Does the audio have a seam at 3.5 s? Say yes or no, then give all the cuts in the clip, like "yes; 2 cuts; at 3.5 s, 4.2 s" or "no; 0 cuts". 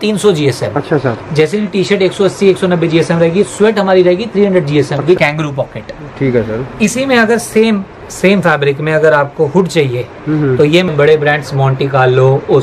no; 2 cuts; at 5.2 s, 10.9 s